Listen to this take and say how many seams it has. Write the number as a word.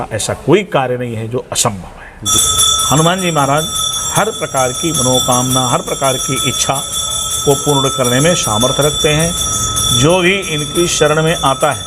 one